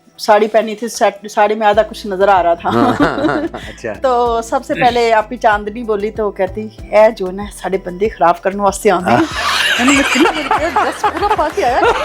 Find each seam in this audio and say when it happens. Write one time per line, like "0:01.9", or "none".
none

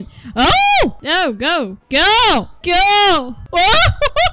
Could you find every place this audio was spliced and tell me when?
none

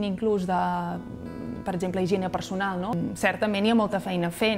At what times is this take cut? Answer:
0:02.9

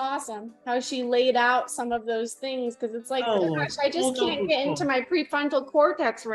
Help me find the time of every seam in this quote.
none

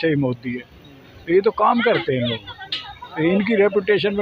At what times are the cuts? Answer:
none

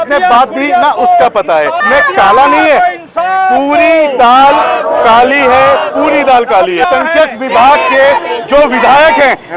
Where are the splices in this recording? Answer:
0:01.8
0:06.9

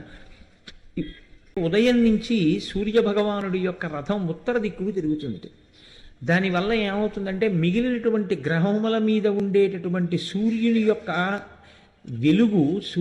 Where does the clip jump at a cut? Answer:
0:01.6

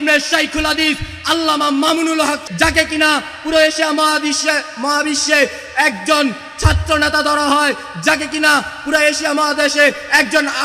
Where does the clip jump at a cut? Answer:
0:02.5

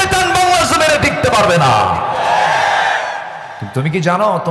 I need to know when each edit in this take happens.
none

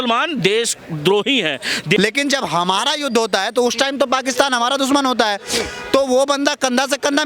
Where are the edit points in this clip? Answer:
0:02.0

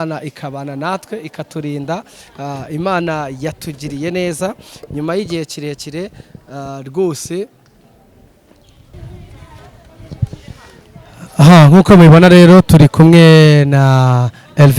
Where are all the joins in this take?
0:08.9

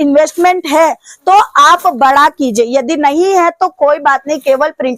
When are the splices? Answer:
none

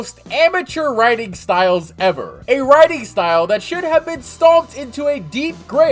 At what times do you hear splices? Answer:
none

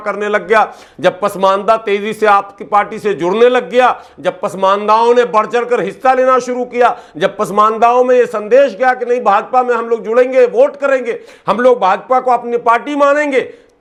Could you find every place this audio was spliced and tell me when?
none

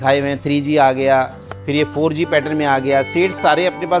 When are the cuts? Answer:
none

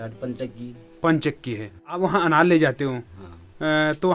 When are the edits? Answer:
0:02.0

